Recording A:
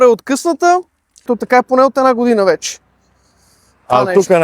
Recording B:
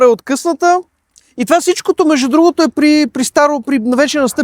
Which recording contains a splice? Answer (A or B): A